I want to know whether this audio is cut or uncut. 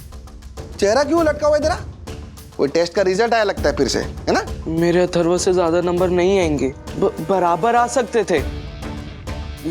cut